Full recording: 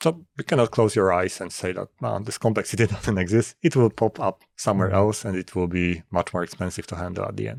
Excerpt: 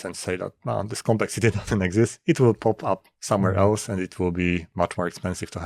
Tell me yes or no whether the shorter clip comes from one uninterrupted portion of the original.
yes